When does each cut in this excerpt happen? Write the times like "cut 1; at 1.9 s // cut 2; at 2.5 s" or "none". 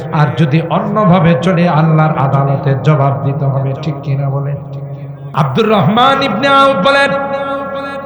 cut 1; at 5.1 s